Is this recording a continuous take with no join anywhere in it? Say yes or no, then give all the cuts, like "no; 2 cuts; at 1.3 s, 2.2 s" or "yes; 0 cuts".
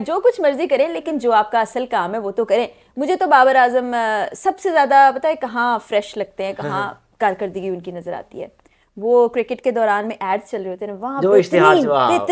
yes; 0 cuts